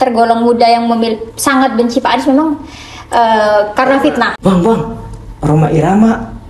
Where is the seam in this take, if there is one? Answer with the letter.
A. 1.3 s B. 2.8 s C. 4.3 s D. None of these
C